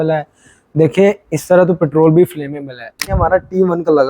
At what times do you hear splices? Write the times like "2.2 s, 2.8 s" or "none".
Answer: 3.2 s